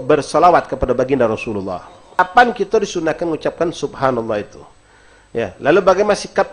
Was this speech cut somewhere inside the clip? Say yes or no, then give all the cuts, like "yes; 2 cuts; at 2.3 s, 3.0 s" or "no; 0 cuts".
yes; 1 cut; at 2.2 s